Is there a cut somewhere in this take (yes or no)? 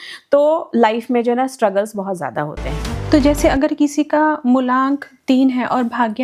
yes